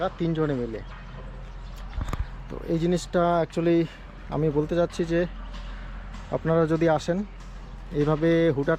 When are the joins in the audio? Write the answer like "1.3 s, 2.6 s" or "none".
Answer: none